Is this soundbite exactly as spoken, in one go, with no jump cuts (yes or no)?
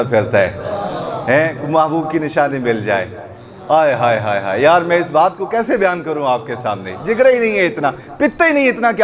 yes